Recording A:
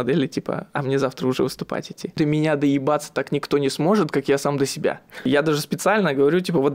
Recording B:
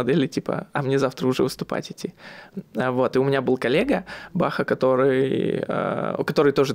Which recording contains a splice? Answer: A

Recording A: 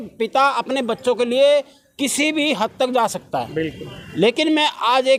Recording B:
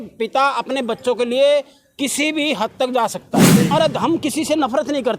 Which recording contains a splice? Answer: B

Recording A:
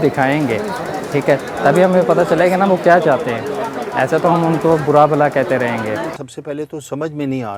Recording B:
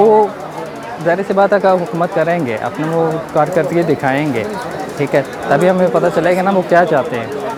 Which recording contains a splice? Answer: A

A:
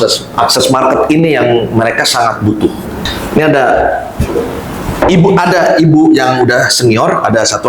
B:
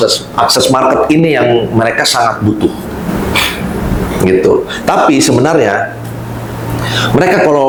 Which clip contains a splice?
A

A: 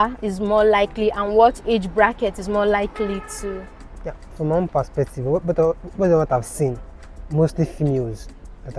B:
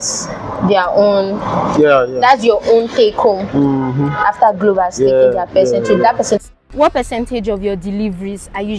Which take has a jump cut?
B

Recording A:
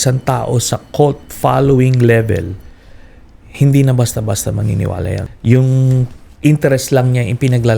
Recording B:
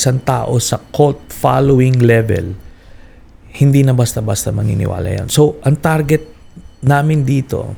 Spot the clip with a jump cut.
A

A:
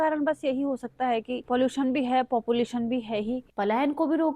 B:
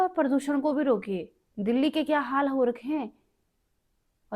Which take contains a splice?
A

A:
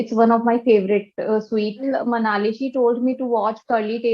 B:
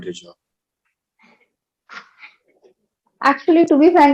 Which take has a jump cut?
A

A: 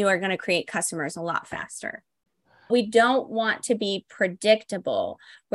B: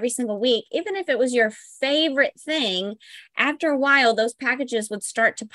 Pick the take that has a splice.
A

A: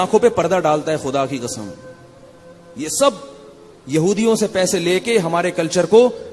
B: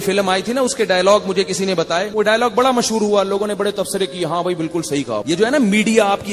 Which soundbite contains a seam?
B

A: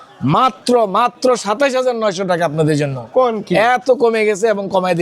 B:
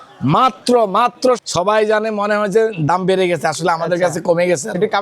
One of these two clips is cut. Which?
B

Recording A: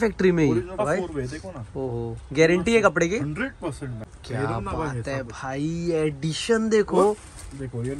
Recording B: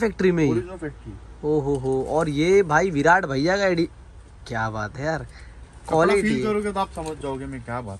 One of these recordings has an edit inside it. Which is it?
A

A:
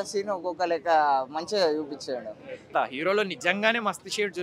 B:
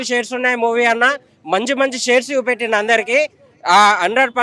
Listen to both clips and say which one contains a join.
A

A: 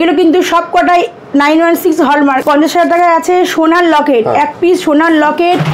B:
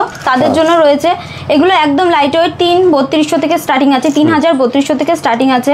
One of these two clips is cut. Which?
A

